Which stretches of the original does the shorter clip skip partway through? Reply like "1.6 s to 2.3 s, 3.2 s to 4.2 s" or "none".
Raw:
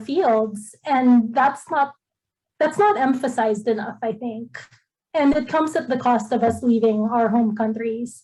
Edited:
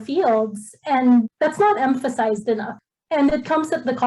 1.3 s to 2.5 s, 3.9 s to 4.7 s